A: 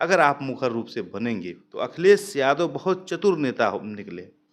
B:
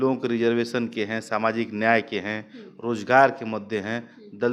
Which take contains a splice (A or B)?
A